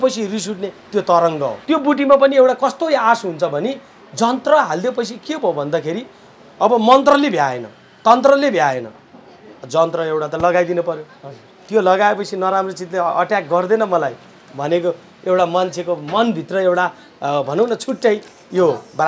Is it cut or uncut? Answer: cut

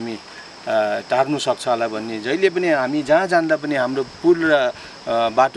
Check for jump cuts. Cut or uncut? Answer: uncut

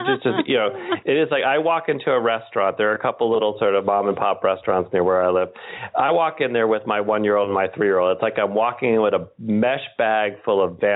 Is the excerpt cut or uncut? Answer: uncut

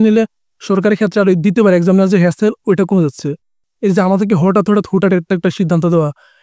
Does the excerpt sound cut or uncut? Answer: cut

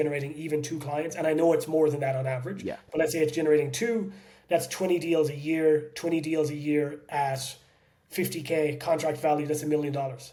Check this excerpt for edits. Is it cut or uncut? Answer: uncut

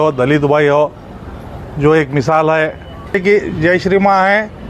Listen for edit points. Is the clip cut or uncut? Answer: cut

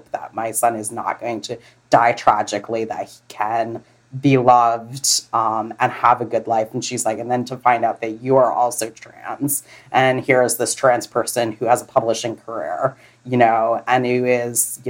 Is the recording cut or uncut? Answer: uncut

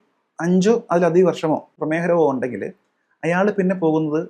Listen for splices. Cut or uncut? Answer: cut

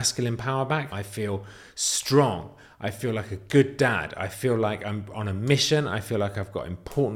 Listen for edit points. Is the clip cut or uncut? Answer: cut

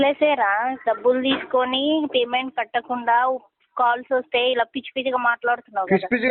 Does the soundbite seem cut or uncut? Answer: uncut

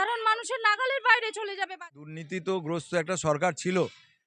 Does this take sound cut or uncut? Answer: cut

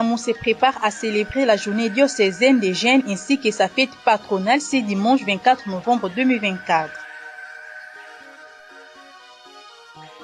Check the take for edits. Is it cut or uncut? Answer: uncut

